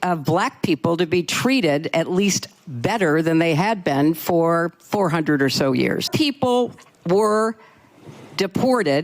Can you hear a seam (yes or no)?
yes